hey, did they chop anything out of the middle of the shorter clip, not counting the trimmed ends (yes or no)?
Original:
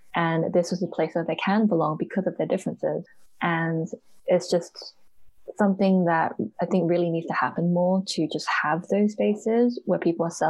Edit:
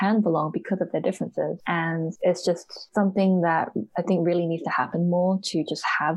yes